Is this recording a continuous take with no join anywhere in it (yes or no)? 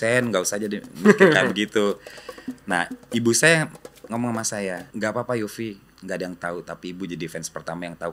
no